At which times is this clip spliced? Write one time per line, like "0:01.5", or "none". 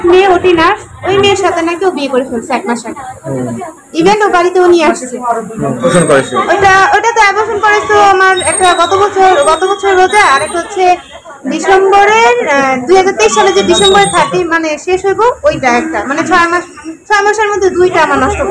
0:05.9